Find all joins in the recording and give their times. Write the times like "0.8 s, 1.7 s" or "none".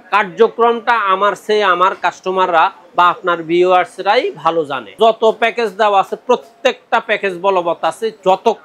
4.9 s